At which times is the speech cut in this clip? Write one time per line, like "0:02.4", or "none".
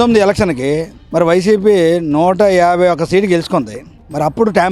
none

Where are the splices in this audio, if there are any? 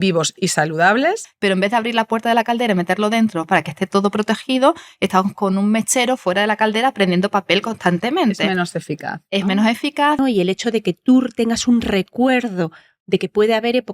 0:01.3
0:10.2

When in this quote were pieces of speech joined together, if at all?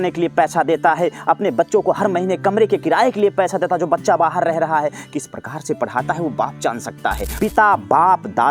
0:07.3

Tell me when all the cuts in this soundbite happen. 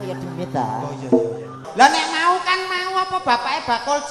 0:01.7

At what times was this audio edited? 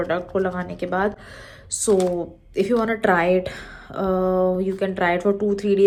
none

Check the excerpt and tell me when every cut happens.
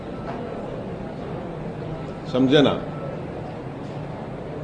none

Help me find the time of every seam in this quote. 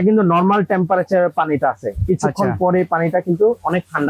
none

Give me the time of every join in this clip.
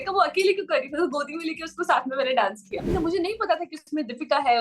0:02.9

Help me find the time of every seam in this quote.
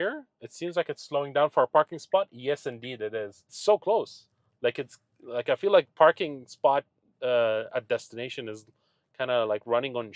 0:03.5

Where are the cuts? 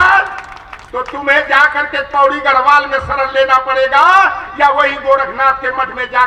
none

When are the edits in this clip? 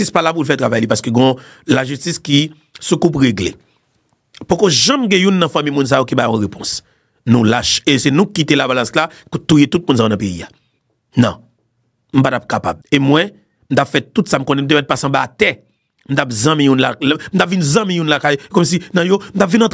0:12.8

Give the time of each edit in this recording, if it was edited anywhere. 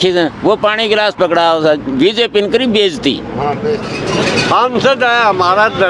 0:04.0

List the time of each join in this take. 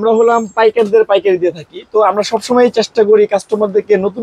none

